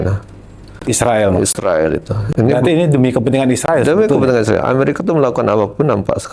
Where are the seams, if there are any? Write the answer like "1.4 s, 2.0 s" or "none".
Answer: none